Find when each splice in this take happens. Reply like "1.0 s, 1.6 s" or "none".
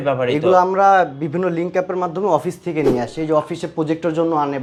none